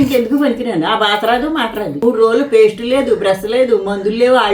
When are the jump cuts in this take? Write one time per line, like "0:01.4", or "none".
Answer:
0:02.0